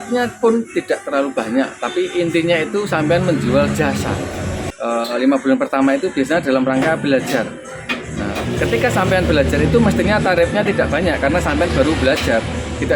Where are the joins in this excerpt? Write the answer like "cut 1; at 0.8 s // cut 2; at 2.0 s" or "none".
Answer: cut 1; at 4.6 s